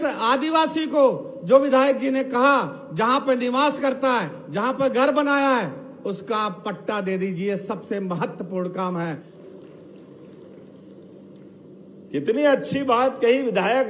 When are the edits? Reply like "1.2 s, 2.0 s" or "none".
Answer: 9.2 s